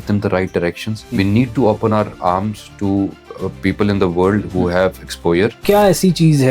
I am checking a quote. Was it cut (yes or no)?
yes